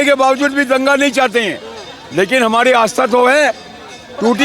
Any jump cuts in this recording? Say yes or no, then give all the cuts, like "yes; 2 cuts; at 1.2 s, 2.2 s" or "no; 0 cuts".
no; 0 cuts